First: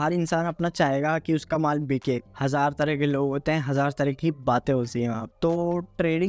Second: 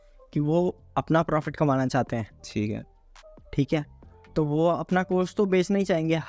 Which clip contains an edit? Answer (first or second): first